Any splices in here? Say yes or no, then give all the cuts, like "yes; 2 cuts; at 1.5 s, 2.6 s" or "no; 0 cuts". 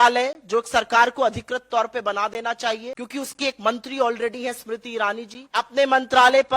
yes; 2 cuts; at 3.0 s, 5.4 s